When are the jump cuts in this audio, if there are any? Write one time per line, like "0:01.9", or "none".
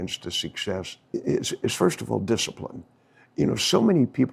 0:01.0